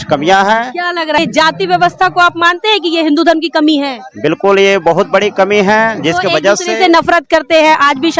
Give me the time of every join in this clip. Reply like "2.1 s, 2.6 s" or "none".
1.2 s

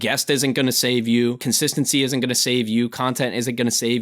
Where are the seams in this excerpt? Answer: 1.4 s

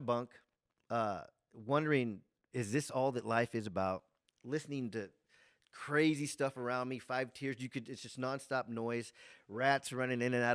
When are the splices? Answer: none

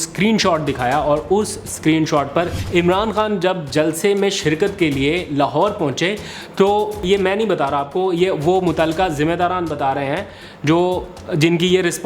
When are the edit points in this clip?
2.5 s, 7.0 s

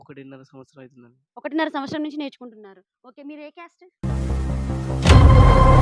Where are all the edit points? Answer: none

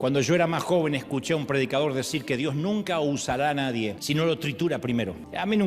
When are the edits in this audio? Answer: 4.0 s

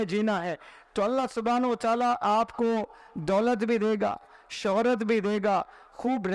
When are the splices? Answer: none

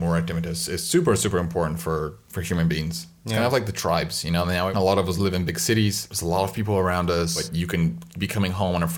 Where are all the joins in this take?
2.3 s, 4.7 s, 6.1 s, 7.4 s

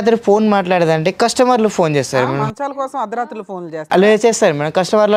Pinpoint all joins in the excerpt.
none

